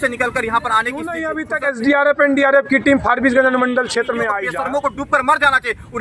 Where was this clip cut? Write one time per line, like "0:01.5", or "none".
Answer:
0:01.3
0:04.4